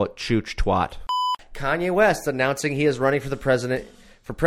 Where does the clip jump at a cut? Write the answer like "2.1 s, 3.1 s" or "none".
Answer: 1.5 s